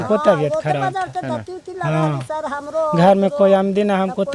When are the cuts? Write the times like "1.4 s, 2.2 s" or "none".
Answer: none